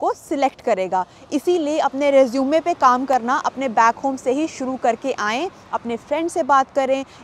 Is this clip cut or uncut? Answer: uncut